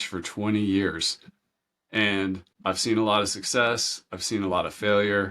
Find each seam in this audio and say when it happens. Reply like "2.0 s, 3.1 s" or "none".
2.5 s